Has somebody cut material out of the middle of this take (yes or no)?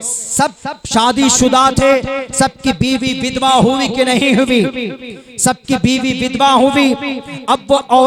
no